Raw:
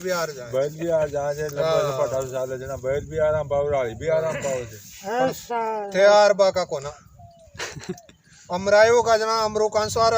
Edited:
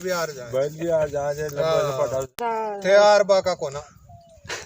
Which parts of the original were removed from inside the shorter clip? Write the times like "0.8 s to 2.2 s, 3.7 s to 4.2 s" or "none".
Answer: 2.3 s to 5.4 s